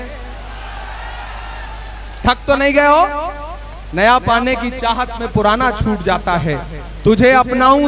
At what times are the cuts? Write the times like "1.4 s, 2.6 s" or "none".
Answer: none